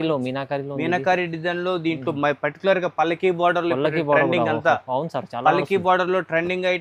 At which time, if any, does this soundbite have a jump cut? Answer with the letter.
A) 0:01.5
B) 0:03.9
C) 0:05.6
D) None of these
D